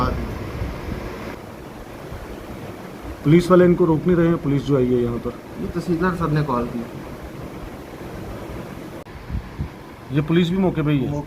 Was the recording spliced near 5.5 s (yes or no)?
no